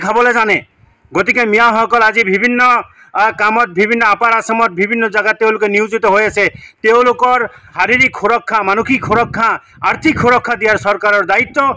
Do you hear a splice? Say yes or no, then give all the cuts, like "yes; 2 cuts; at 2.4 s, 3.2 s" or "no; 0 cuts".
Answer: yes; 1 cut; at 7.6 s